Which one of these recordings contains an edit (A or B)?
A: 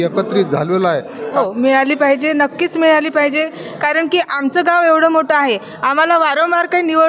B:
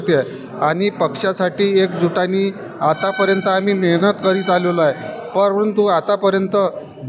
A